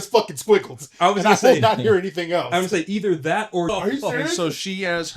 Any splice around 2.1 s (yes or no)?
no